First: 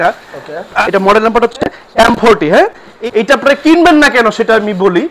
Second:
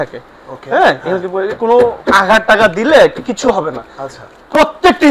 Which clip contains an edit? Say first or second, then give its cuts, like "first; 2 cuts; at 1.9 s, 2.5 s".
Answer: first; 2 cuts; at 0.9 s, 2.9 s